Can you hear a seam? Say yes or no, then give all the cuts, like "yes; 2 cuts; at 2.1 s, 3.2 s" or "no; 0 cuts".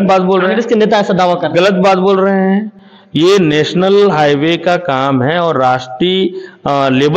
no; 0 cuts